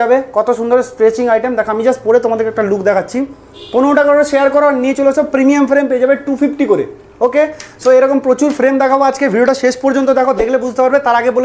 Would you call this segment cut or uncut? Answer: uncut